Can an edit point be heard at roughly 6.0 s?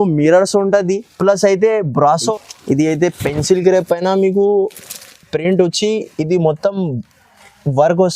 no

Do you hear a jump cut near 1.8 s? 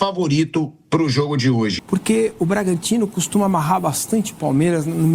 yes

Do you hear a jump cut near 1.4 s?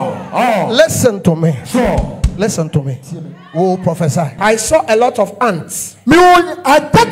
no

